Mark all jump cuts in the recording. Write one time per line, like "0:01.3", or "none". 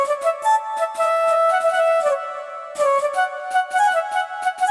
none